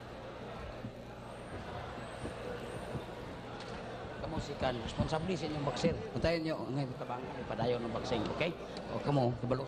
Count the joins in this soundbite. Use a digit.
1